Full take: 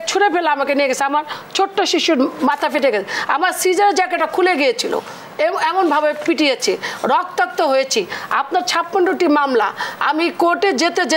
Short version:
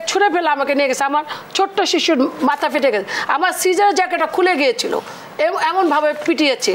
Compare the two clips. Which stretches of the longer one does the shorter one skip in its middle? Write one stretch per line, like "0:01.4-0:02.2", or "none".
none